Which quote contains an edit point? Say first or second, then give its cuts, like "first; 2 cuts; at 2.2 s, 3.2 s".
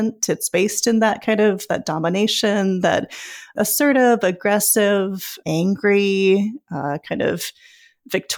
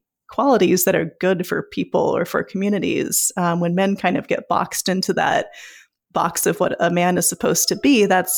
first; 2 cuts; at 3.5 s, 5.4 s